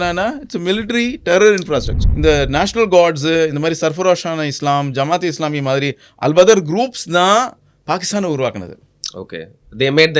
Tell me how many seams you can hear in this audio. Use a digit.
1